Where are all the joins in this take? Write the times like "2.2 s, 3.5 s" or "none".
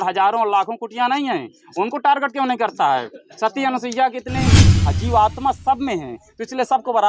4.5 s